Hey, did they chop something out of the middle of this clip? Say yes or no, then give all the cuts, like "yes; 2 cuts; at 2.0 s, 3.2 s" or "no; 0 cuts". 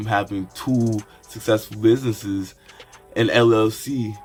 no; 0 cuts